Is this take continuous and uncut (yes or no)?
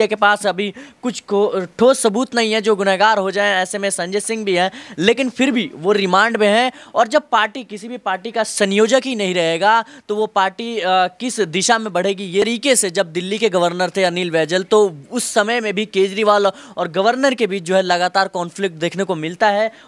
no